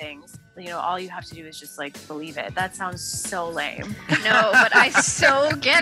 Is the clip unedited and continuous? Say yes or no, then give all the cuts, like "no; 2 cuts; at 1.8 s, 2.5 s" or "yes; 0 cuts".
yes; 0 cuts